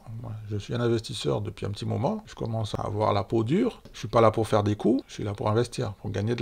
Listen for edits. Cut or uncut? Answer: cut